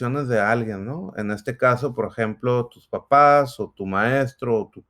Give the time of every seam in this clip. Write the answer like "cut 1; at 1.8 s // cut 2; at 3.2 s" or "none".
none